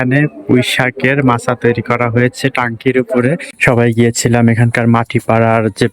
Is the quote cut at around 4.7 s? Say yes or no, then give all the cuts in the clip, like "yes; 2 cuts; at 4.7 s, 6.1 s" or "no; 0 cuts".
no; 1 cut; at 3.5 s